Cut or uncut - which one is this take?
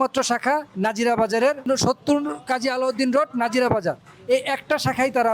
cut